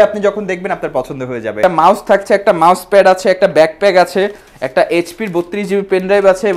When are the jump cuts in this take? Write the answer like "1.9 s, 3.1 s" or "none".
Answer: 1.6 s